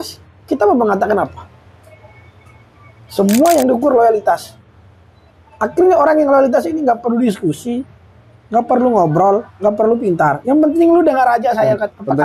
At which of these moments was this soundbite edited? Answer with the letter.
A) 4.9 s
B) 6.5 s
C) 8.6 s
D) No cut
D